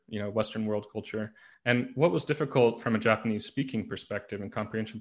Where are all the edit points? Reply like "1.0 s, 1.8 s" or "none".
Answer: 1.4 s